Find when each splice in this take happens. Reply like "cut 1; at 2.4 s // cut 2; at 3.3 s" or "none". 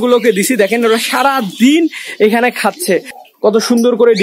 cut 1; at 3.2 s